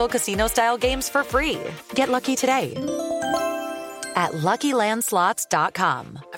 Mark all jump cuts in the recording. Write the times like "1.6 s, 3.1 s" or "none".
2.7 s, 4.0 s